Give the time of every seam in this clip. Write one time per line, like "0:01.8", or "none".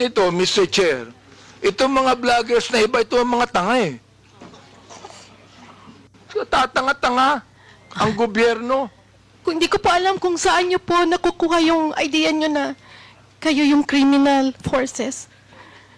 0:09.3